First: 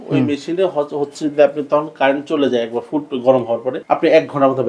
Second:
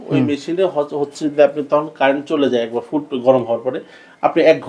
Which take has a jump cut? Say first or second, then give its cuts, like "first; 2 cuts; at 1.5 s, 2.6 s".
first; 1 cut; at 3.7 s